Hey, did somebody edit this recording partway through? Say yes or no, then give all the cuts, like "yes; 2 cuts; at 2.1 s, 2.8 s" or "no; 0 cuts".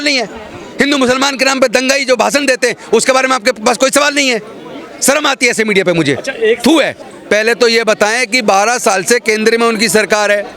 yes; 1 cut; at 7.0 s